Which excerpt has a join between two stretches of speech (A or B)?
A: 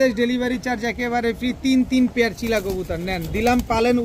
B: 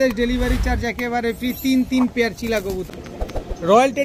B